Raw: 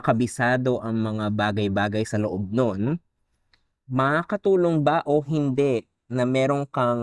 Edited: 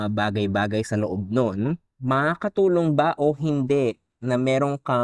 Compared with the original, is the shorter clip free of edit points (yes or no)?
no